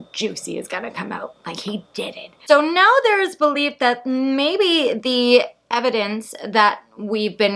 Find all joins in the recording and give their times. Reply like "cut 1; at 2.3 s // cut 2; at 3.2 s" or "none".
cut 1; at 2.4 s